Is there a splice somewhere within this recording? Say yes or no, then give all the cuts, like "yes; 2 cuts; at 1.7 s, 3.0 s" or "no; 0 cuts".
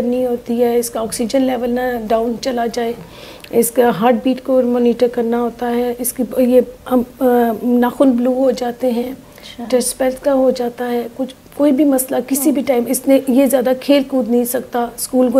no; 0 cuts